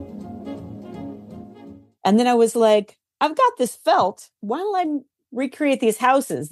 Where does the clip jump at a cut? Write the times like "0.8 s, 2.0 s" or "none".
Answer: 2.0 s